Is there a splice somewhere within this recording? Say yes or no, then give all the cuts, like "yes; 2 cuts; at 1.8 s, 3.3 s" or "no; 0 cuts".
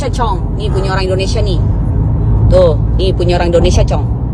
no; 0 cuts